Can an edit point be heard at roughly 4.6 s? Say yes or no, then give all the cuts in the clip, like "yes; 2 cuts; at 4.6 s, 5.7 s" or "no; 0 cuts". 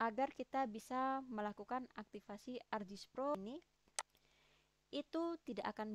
no; 1 cut; at 3.4 s